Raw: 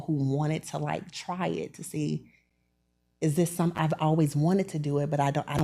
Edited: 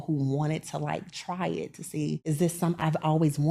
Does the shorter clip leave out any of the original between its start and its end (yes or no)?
yes